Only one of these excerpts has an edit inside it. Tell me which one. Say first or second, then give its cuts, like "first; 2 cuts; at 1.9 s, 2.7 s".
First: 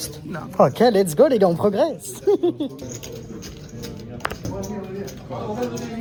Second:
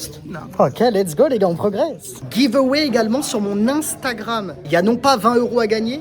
second; 2 cuts; at 2.1 s, 4.6 s